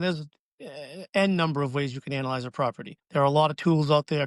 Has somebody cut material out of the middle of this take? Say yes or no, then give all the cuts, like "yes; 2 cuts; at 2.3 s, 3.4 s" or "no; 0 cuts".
no; 0 cuts